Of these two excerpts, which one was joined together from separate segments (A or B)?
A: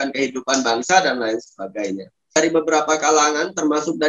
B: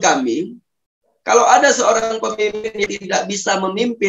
A